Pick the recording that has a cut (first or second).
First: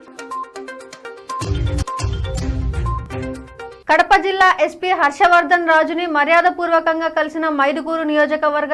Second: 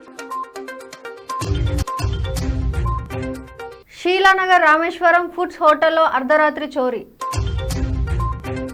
first